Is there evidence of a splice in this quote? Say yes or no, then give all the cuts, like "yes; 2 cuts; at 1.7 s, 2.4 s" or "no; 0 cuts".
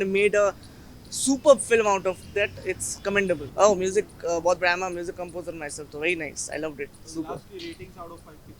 no; 0 cuts